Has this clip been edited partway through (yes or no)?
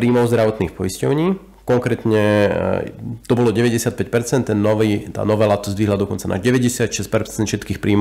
no